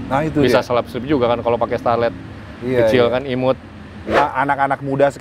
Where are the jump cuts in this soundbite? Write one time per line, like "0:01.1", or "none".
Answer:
0:04.2